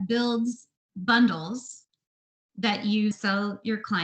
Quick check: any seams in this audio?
yes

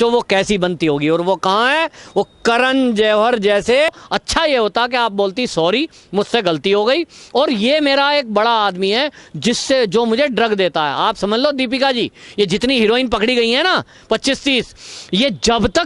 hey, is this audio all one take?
no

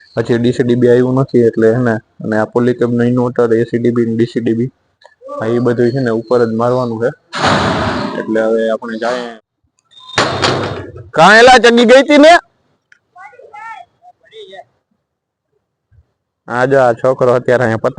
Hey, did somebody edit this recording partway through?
yes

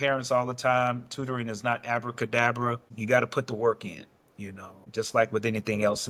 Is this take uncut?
yes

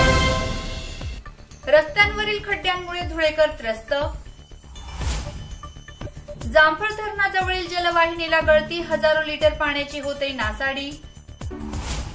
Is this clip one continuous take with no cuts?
no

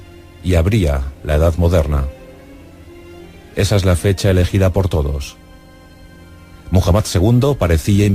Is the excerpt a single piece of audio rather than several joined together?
yes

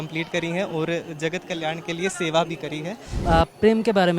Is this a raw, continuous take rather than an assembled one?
no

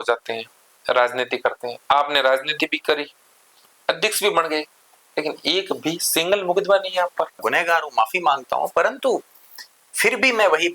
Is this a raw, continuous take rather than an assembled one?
no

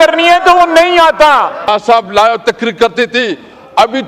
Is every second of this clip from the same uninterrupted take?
no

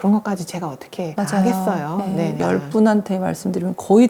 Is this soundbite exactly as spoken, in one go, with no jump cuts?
yes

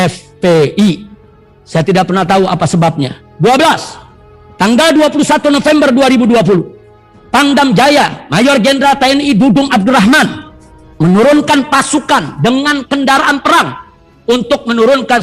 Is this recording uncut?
yes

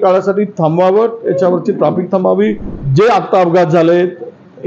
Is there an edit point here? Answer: yes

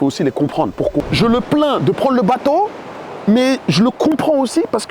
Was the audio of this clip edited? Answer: yes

